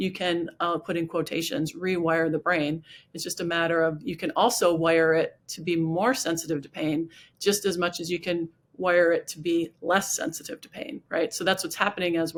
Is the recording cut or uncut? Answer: uncut